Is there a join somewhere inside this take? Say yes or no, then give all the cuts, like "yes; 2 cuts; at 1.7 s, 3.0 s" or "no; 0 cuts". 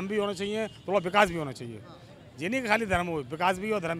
no; 0 cuts